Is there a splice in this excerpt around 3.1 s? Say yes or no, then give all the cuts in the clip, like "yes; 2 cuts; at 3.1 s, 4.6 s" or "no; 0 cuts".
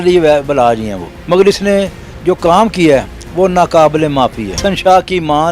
no; 2 cuts; at 1.1 s, 4.6 s